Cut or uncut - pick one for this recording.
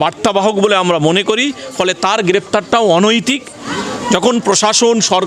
cut